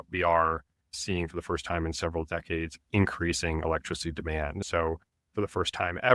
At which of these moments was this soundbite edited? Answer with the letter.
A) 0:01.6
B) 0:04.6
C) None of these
B